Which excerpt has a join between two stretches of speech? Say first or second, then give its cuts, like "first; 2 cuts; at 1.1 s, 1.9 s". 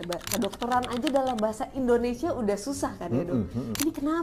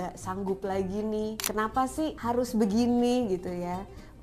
second; 1 cut; at 2.2 s